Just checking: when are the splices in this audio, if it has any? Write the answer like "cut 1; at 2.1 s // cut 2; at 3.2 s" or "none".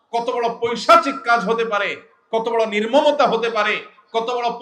none